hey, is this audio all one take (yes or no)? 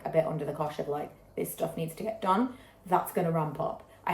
yes